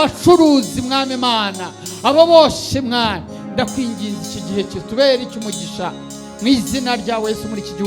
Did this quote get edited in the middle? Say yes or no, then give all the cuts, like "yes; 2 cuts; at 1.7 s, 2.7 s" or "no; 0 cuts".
no; 0 cuts